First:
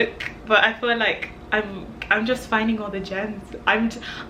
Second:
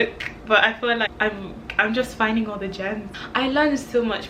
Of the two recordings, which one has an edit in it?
second; 2 cuts; at 1.1 s, 3.1 s

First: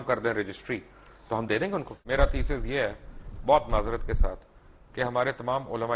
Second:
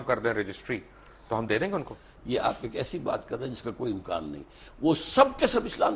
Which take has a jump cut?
first; 1 cut; at 2.0 s

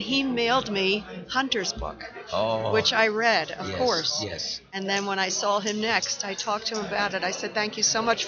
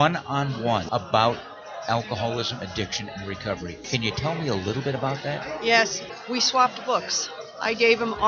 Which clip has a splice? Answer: second; 3 cuts; at 0.9 s, 3.8 s, 6.0 s

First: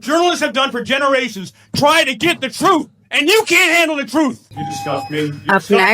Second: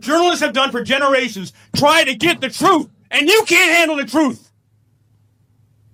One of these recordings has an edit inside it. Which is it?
first; 1 cut; at 4.5 s

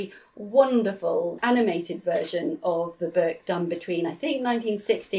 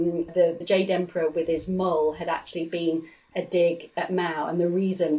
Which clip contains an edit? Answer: first; 1 cut; at 1.4 s

